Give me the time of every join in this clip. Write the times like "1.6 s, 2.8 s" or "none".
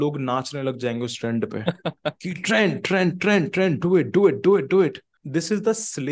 5.1 s

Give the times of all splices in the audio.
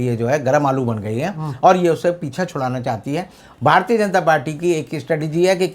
3.4 s

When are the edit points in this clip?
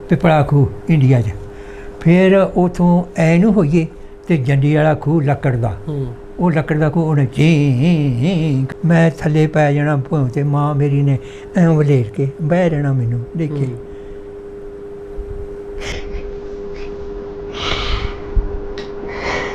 8.7 s

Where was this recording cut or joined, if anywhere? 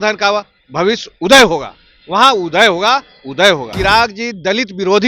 3.7 s

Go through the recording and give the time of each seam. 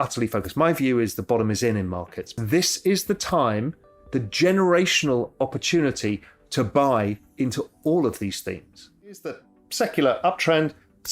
2.3 s, 9.2 s

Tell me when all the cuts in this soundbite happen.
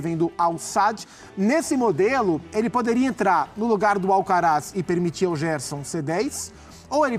none

